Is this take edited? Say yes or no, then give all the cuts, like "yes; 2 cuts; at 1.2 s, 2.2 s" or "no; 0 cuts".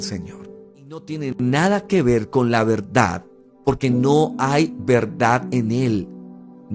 yes; 1 cut; at 1.1 s